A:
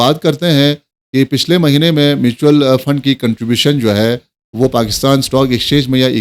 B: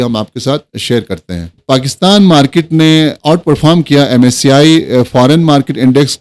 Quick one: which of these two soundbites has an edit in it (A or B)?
B